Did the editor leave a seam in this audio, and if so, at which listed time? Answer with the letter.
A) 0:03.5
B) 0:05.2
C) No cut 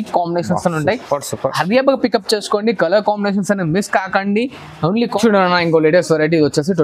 B